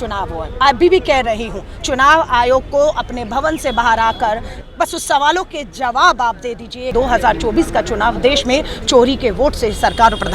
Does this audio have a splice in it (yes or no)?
yes